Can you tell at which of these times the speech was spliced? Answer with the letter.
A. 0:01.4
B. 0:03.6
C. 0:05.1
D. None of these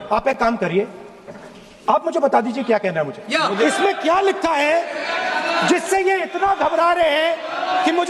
B